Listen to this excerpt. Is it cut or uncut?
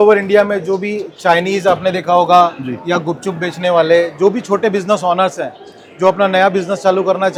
uncut